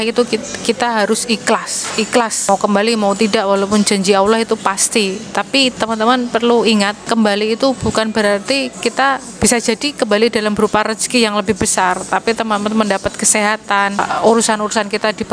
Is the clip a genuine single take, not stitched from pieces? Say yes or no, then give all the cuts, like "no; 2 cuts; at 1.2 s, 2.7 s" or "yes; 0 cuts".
no; 3 cuts; at 2.5 s, 7.0 s, 14.0 s